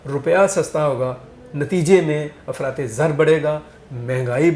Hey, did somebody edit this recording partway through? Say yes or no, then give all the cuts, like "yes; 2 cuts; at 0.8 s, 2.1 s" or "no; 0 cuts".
no; 0 cuts